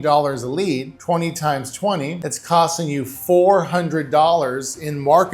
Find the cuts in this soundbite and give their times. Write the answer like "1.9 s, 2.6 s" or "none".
0.9 s, 2.3 s